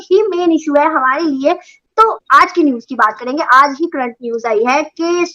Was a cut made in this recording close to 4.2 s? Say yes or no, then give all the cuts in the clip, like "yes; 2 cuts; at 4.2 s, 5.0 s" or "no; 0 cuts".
no; 1 cut; at 1.7 s